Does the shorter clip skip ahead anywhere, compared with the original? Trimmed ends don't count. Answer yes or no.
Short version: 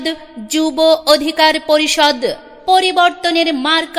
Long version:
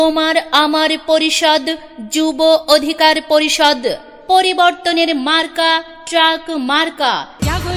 no